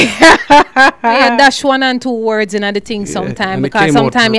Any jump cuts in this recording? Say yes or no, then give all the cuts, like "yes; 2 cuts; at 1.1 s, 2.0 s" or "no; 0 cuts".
yes; 1 cut; at 1.3 s